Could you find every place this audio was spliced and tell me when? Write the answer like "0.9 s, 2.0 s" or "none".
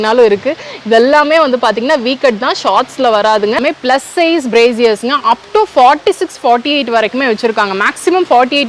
3.6 s